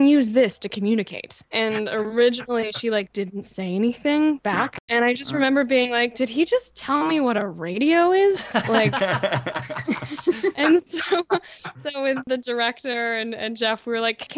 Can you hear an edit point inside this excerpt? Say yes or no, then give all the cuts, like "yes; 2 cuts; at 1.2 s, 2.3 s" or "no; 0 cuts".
no; 0 cuts